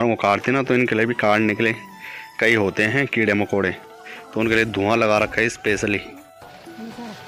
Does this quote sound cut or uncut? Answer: uncut